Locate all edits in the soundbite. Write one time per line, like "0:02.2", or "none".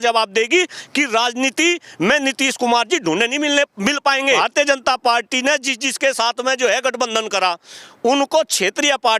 0:04.4

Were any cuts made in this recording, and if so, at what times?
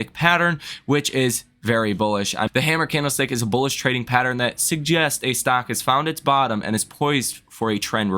0:02.5

